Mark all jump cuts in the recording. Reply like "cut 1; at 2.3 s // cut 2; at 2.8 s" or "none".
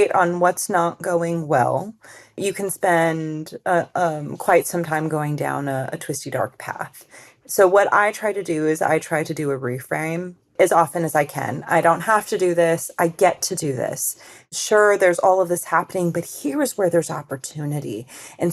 cut 1; at 2.3 s // cut 2; at 10.5 s